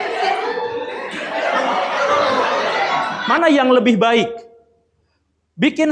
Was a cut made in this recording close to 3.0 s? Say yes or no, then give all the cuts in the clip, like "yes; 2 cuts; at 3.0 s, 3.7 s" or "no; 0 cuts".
yes; 1 cut; at 3.0 s